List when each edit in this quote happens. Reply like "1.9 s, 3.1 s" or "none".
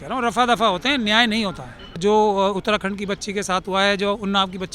2.0 s